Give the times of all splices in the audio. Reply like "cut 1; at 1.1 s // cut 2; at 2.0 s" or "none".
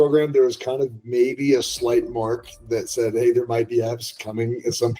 none